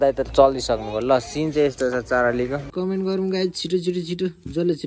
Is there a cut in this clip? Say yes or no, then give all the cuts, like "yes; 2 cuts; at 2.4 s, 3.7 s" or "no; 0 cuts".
yes; 1 cut; at 2.7 s